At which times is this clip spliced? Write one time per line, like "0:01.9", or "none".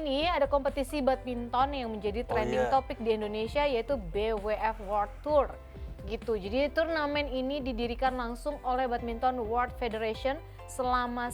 none